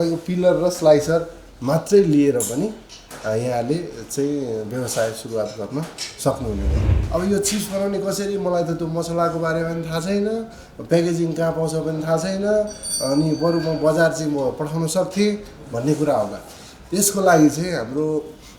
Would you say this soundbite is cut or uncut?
cut